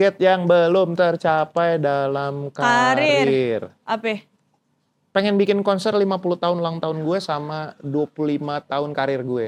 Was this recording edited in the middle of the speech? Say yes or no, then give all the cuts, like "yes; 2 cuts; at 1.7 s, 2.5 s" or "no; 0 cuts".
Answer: no; 0 cuts